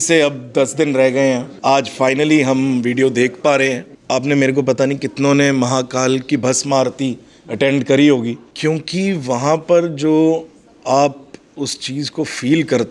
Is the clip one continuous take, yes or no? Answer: no